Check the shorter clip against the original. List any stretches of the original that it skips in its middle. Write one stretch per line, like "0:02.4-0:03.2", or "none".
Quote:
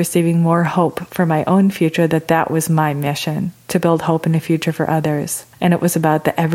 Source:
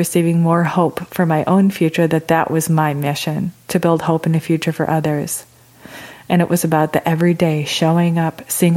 0:05.4-0:06.1